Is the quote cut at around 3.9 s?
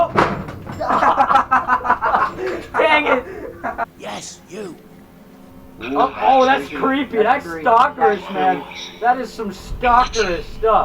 yes; 1 cut; at 3.9 s

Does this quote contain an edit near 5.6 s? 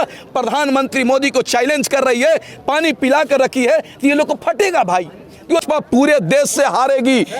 yes; 1 cut; at 5.6 s

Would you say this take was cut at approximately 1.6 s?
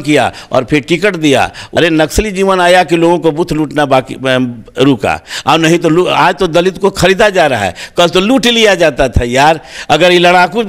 yes; 1 cut; at 1.6 s

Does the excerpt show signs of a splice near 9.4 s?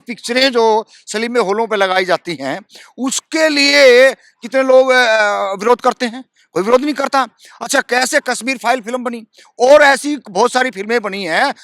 no; 0 cuts

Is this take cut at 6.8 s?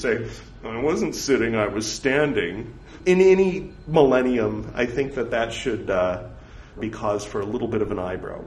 yes; 2 cuts; at 3.0 s, 6.8 s

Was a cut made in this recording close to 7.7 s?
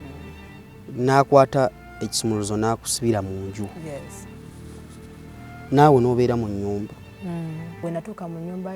yes; 1 cut; at 7.7 s

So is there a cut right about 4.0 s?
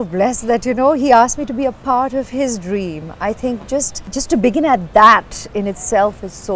yes; 1 cut; at 4.0 s

